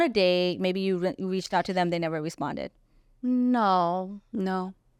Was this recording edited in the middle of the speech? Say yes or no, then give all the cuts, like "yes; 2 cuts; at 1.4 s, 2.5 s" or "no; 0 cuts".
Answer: no; 0 cuts